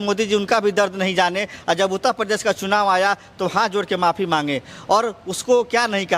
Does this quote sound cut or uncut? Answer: uncut